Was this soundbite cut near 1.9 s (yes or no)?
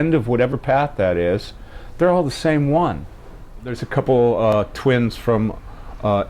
no